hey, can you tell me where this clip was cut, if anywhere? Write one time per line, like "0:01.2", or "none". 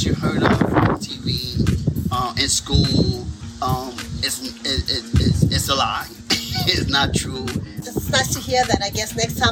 0:07.8